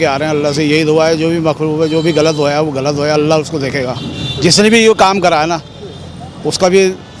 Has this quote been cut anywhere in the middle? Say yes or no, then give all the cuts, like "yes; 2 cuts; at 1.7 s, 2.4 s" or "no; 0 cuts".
no; 0 cuts